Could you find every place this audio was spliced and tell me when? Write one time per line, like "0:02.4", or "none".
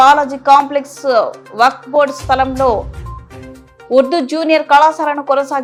none